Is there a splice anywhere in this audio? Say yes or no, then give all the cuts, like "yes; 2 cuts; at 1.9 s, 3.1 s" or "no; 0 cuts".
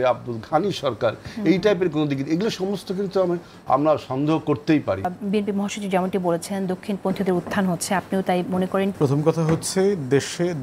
yes; 2 cuts; at 5.2 s, 8.9 s